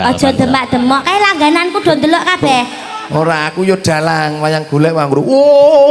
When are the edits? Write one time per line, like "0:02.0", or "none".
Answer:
none